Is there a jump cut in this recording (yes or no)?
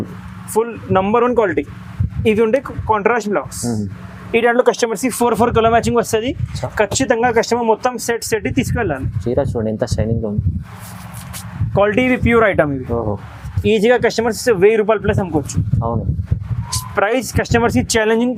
no